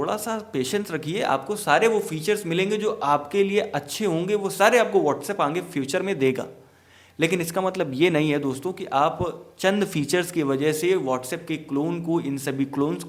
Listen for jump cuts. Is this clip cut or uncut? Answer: uncut